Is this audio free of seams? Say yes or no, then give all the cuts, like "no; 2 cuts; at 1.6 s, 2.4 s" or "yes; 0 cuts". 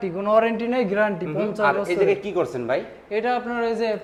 yes; 0 cuts